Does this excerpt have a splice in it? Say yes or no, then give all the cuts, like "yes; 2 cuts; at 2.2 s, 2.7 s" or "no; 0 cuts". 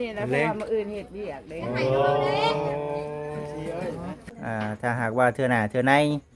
yes; 1 cut; at 4.3 s